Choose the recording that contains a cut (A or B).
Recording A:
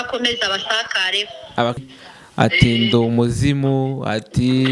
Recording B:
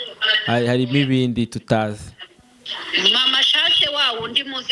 A